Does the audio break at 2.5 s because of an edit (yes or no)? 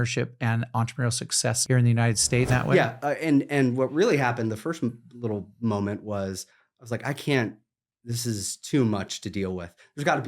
yes